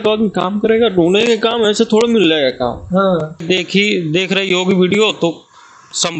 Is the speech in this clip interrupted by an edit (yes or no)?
yes